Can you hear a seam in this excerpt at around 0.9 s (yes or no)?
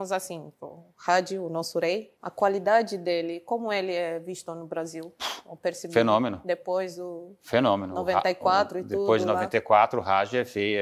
no